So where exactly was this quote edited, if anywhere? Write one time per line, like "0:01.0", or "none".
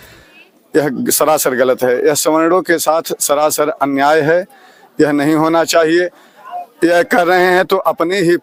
none